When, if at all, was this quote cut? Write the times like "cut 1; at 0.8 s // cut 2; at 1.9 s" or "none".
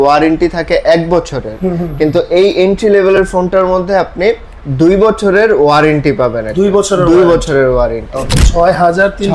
cut 1; at 8.2 s